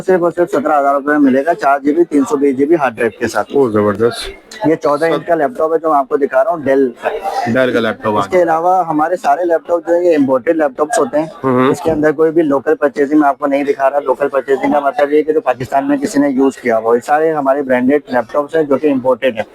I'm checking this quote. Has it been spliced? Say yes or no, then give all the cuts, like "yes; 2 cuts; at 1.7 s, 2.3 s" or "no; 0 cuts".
no; 0 cuts